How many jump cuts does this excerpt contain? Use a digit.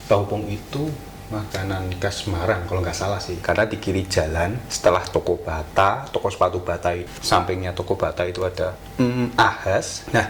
4